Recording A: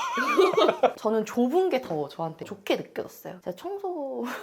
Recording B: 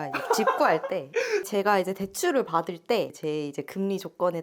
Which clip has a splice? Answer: A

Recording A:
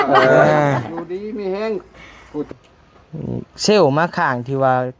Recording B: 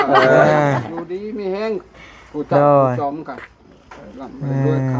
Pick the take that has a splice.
A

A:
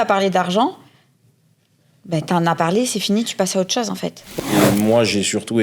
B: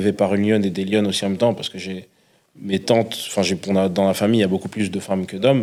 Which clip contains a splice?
A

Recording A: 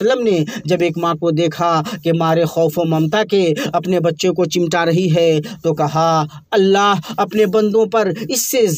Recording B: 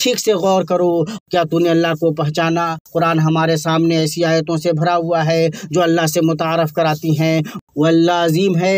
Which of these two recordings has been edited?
B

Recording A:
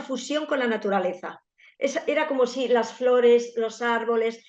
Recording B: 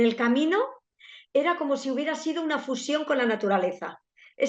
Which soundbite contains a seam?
B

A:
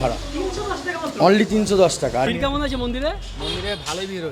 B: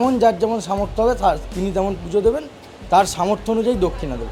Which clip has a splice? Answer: A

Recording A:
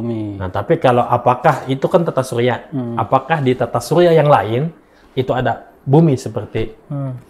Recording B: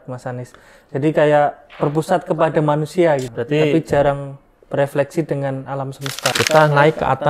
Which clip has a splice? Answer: B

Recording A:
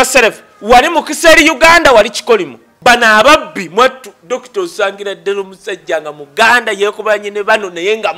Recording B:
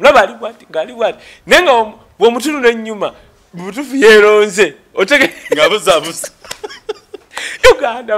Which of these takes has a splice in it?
A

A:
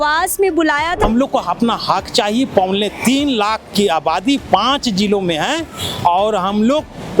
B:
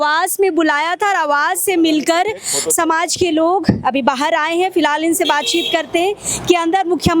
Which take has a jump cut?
A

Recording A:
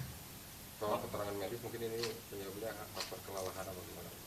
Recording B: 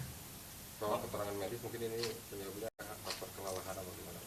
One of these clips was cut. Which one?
A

